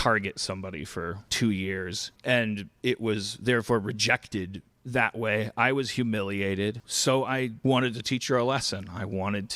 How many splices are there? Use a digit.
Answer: 2